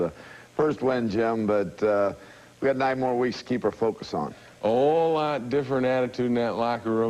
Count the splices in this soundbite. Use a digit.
1